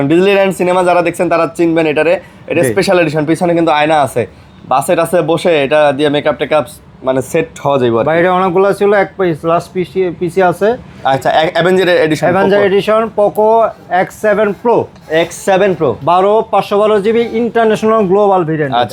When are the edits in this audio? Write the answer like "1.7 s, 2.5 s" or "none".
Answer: none